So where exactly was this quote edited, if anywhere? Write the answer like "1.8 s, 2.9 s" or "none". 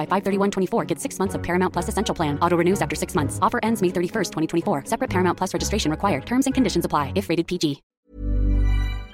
7.9 s